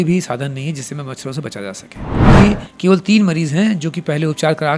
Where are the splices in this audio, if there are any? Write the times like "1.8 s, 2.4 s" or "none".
2.2 s